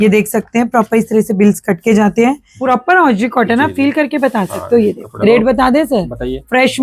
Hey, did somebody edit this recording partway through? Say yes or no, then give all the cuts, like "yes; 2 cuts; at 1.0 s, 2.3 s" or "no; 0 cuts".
yes; 2 cuts; at 2.5 s, 5.1 s